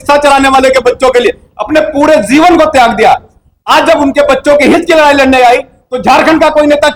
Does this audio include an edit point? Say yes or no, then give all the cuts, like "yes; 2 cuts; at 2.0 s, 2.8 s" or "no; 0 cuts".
no; 0 cuts